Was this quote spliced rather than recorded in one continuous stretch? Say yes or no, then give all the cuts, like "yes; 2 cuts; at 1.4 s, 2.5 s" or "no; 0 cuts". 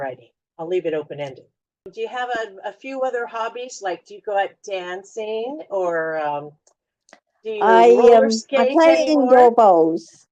yes; 1 cut; at 1.9 s